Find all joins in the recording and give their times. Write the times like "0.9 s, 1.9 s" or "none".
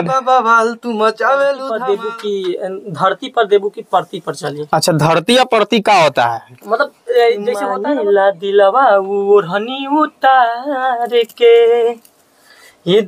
1.7 s, 7.7 s

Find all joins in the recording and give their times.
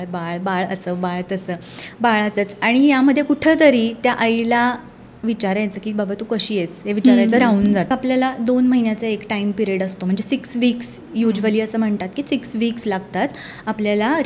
7.9 s

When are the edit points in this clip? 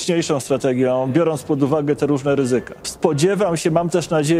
2.8 s

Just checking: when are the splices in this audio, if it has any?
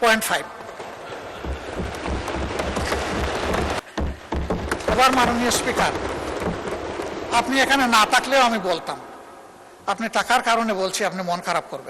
3.8 s

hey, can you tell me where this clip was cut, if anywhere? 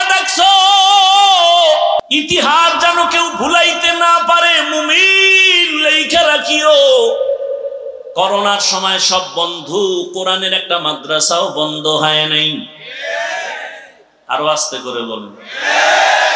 2.0 s

